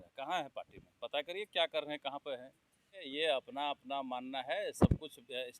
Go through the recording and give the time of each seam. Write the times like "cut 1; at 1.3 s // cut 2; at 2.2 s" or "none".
cut 1; at 3.1 s